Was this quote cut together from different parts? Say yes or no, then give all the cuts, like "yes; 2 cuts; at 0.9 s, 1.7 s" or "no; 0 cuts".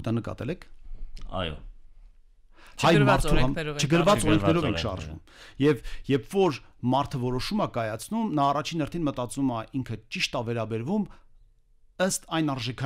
no; 0 cuts